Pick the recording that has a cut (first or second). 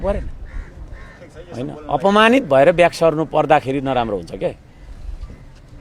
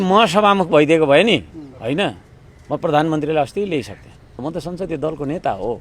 second